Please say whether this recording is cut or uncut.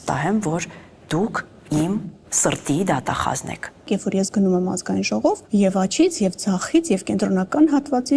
cut